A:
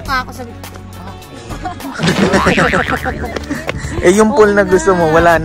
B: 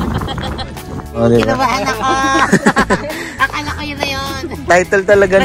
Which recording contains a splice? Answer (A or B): B